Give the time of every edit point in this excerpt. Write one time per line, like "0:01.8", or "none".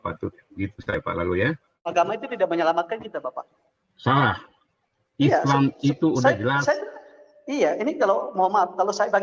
0:01.9